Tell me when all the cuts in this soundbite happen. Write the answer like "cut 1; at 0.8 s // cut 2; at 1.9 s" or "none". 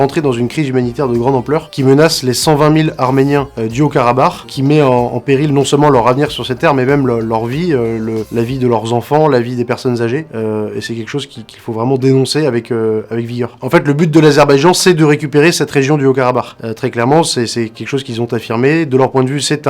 none